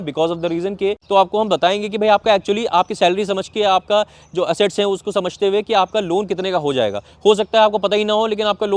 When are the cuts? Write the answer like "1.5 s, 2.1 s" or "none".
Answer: 1.0 s

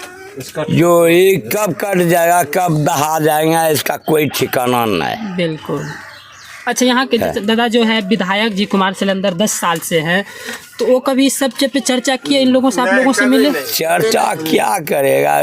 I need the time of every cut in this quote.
none

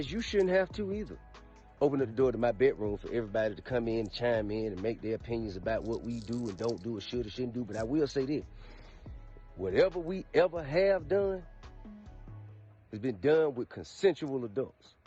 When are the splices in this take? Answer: none

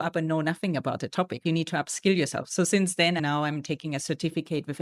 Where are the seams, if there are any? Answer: 1.4 s

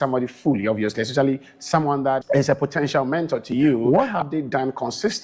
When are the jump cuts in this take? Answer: 2.2 s, 3.8 s

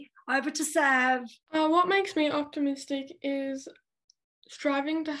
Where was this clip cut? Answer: 1.4 s

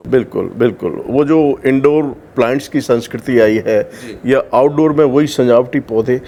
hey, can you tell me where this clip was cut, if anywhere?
none

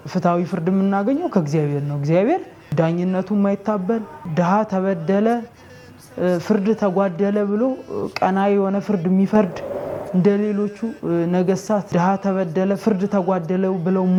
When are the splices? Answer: none

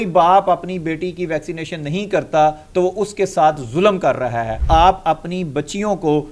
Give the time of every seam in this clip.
4.6 s

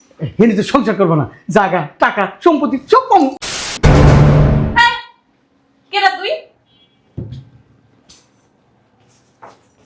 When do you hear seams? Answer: 3.7 s

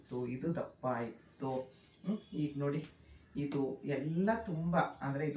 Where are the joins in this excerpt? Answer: none

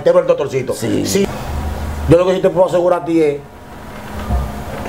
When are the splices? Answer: 1.2 s

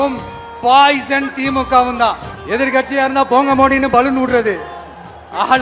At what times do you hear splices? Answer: 2.3 s

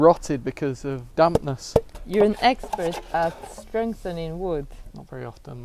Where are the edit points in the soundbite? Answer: 1.1 s, 2.0 s

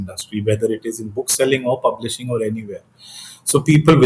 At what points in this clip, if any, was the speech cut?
none

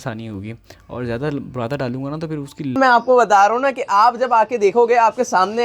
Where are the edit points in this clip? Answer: 2.8 s

